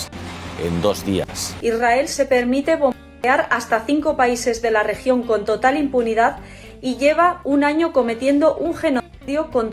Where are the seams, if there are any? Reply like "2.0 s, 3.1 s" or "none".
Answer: 1.5 s

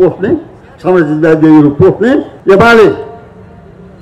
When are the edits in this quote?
2.3 s

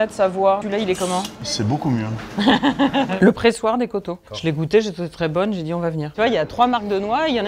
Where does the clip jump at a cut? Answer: 0.8 s, 3.1 s, 6.1 s

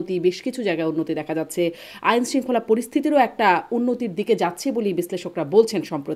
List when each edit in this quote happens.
none

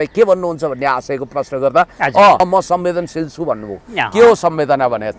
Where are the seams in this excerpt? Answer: 2.4 s

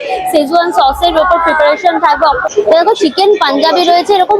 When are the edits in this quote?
2.5 s

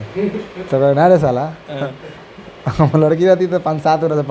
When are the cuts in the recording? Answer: none

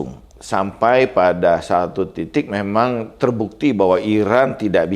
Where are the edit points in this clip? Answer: none

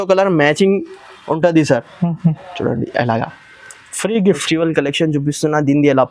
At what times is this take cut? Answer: 4.4 s

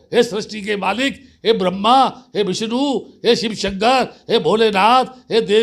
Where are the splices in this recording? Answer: none

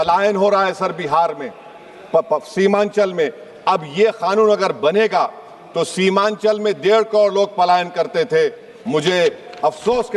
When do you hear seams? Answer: none

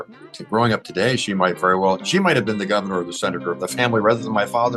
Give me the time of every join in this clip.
none

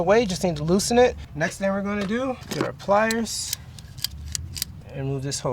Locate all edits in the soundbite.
1.3 s, 2.4 s, 4.8 s

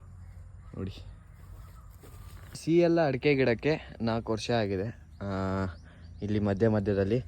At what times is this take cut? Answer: 2.6 s

